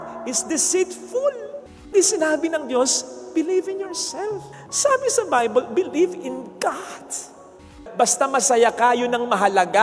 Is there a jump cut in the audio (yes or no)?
yes